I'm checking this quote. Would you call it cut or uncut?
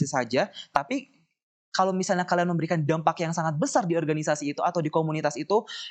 uncut